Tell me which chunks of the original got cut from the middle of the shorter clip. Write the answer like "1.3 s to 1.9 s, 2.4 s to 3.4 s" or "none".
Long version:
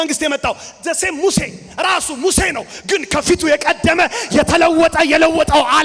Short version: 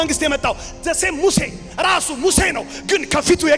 none